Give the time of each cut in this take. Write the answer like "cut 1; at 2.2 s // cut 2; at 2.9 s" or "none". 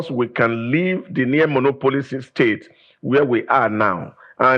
none